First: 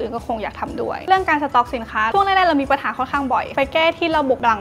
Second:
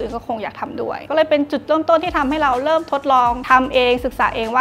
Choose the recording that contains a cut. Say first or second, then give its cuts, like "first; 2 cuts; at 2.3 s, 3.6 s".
first; 2 cuts; at 1.0 s, 3.5 s